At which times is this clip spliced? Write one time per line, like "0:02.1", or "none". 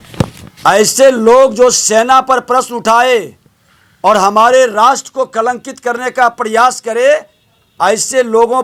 none